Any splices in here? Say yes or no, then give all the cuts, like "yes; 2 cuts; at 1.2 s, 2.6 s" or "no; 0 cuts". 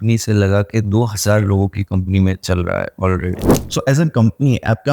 yes; 1 cut; at 3.5 s